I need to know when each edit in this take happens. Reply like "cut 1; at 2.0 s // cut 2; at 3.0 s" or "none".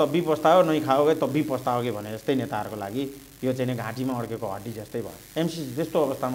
cut 1; at 5.2 s